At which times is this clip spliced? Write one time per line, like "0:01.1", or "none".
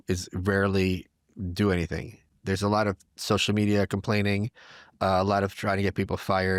none